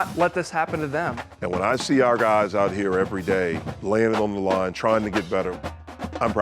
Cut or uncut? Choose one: cut